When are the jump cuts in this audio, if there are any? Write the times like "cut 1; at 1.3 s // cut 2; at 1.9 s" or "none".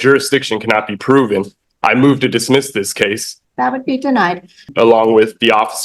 cut 1; at 3.3 s // cut 2; at 4.7 s